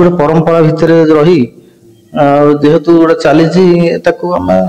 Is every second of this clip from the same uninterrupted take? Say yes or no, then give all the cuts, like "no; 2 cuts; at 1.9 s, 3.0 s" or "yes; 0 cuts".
yes; 0 cuts